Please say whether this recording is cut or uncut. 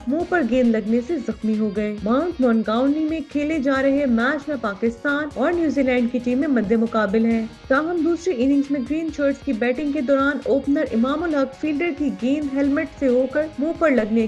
uncut